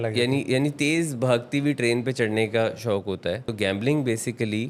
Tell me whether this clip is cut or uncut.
cut